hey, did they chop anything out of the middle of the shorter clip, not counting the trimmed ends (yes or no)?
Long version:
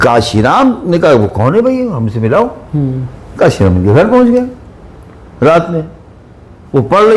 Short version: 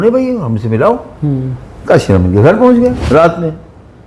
yes